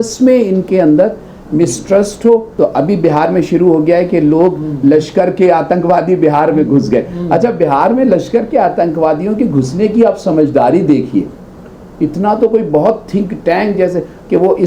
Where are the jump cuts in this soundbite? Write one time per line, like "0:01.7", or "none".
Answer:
0:02.5